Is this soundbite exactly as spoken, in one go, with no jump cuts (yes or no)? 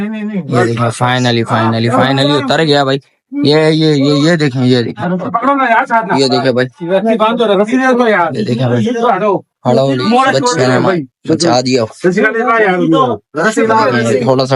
yes